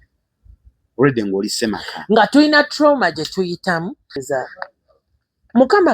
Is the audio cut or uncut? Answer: cut